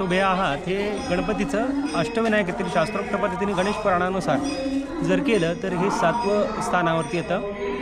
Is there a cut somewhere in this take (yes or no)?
no